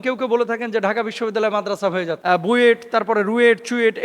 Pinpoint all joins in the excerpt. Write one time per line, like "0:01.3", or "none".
0:02.1